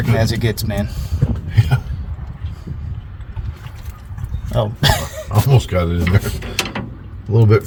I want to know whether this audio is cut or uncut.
uncut